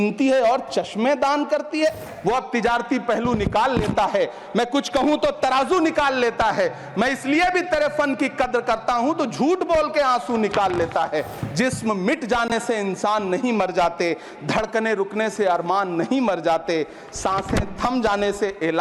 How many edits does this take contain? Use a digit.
2